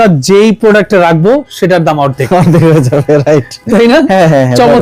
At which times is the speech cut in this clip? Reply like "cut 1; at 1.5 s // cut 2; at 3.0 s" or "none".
none